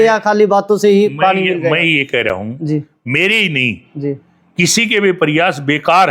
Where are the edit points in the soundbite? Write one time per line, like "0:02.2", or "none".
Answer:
none